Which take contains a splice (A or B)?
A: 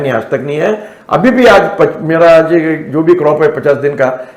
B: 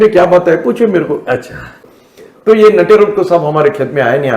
B